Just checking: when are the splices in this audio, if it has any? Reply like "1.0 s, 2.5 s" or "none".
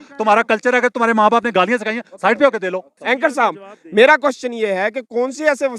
2.9 s